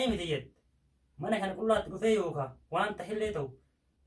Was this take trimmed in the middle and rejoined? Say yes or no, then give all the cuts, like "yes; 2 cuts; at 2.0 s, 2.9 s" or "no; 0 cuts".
no; 0 cuts